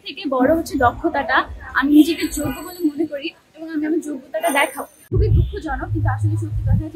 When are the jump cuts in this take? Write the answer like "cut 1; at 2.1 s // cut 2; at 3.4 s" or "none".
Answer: cut 1; at 4.9 s